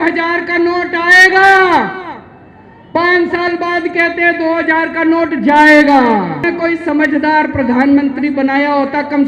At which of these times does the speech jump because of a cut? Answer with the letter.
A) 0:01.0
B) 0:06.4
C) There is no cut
B